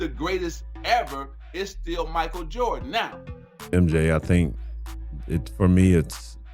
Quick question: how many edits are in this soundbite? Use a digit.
1